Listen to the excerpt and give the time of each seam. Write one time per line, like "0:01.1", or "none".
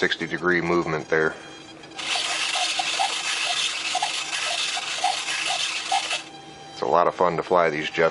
0:01.5